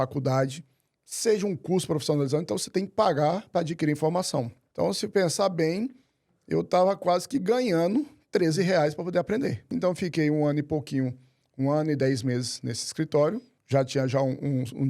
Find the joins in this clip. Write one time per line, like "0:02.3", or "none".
0:04.6
0:09.7
0:13.5

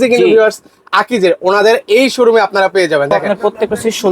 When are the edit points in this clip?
0:03.2

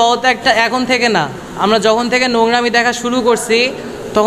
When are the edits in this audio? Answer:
none

